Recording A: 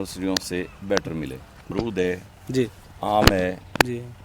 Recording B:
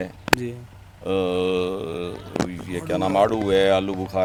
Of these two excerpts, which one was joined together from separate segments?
A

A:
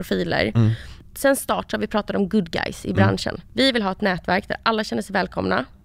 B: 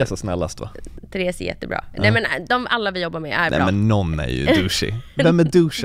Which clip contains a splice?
A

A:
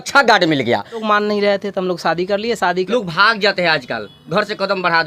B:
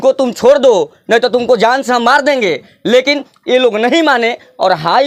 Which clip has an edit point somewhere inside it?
A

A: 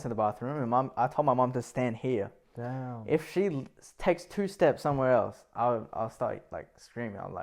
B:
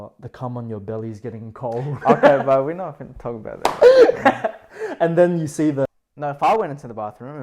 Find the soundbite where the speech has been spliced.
B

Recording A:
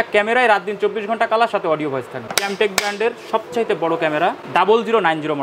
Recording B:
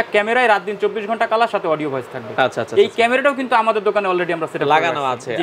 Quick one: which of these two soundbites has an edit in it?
A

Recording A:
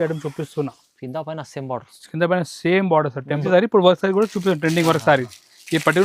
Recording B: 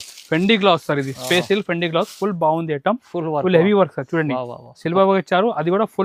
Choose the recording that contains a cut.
A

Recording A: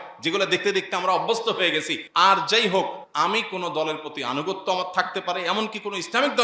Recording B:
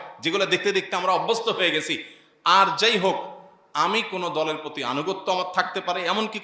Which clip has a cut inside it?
A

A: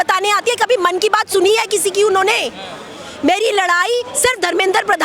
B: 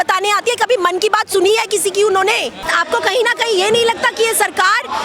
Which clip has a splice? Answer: B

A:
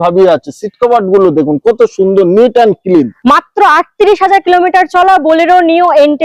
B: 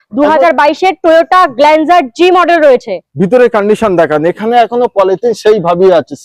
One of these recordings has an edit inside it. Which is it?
A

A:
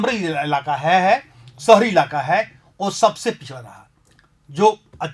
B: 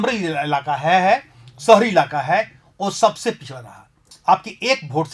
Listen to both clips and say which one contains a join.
B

